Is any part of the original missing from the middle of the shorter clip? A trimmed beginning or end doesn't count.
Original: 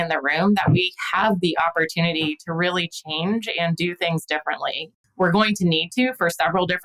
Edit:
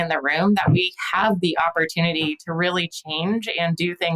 no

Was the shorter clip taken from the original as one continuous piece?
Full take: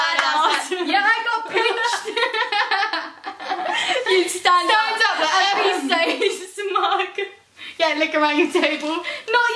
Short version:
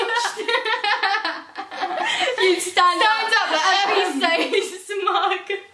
yes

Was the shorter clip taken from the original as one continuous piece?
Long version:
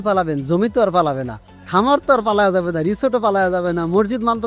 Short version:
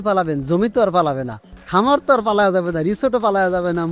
yes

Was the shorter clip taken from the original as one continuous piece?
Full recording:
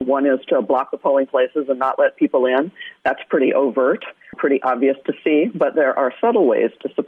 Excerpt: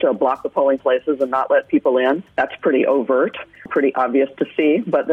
no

